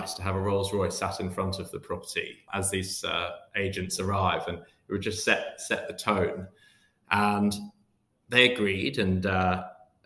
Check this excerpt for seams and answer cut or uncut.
uncut